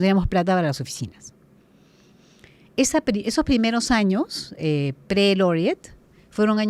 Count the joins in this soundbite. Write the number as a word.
zero